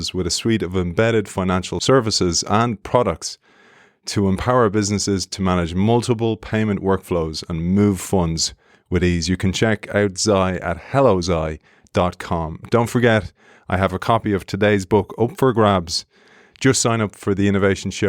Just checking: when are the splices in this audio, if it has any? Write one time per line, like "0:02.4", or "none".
0:01.7